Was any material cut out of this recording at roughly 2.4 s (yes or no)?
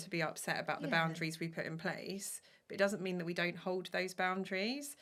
no